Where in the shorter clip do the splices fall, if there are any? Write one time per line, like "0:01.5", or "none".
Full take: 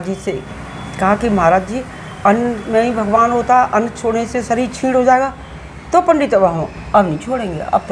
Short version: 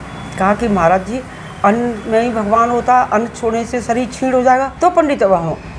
0:04.7

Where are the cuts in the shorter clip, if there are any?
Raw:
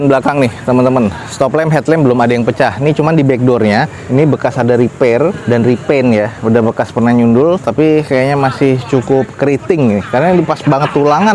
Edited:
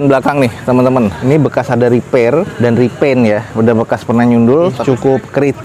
0:01.2
0:04.8

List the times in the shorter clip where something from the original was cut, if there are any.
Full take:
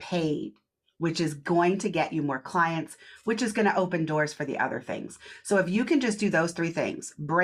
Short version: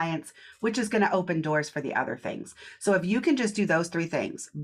none

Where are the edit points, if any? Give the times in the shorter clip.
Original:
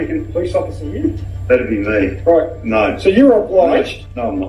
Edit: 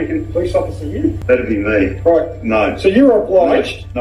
0:01.2

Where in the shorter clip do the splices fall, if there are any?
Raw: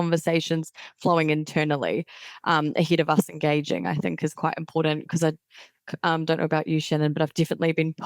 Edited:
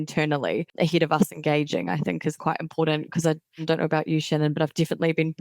0:00.7
0:03.6

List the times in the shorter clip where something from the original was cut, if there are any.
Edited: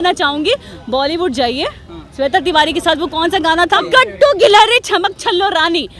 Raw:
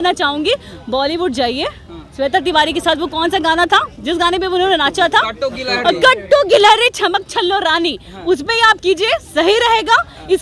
0:03.8

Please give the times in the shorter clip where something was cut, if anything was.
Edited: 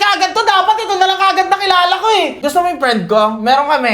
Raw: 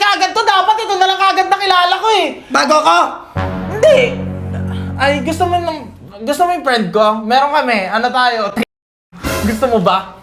0:02.4

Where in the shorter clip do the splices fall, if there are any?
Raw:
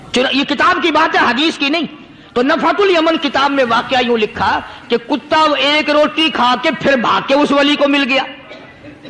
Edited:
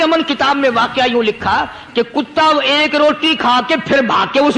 none

